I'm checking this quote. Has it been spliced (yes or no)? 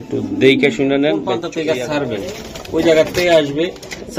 yes